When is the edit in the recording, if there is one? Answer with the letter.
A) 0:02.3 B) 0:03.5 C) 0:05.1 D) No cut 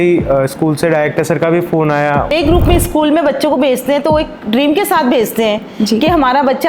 A